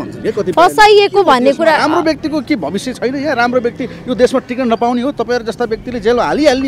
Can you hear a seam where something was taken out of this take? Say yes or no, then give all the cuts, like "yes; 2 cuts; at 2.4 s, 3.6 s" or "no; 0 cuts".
no; 0 cuts